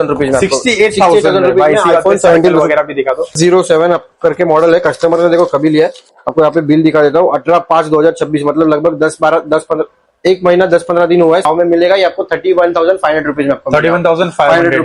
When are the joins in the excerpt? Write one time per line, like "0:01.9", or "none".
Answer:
0:03.3
0:11.4